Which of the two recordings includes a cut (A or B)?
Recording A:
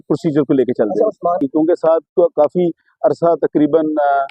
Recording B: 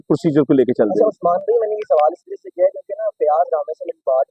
A